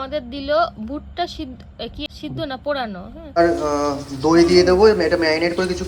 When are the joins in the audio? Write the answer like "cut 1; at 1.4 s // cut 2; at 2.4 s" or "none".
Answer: cut 1; at 2.0 s // cut 2; at 3.1 s